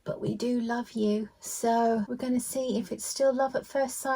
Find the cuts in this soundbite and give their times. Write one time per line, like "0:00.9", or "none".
0:02.1